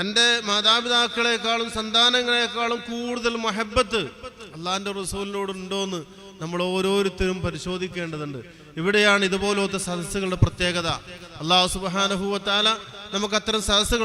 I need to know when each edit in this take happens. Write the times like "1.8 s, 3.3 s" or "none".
none